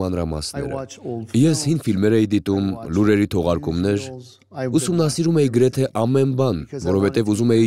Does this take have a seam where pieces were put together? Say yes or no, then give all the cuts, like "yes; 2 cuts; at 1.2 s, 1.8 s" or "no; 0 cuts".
no; 0 cuts